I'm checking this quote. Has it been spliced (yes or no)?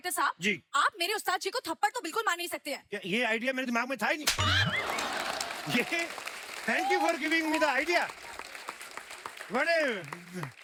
no